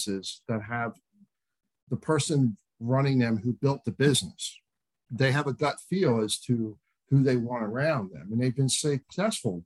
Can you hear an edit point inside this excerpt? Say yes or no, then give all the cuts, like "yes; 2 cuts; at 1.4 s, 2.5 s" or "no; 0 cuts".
no; 0 cuts